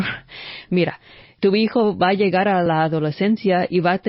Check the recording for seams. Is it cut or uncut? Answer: cut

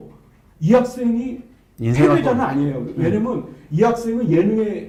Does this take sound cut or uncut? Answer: uncut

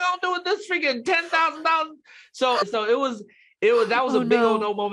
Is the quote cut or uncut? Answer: uncut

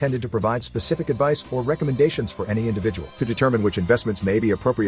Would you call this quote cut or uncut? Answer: uncut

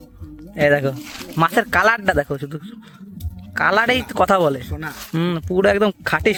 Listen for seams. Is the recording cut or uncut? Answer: uncut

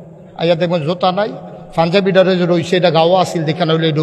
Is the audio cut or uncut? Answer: uncut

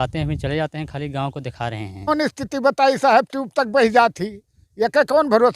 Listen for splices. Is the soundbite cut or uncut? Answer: cut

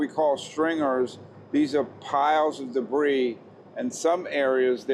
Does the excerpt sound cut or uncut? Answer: uncut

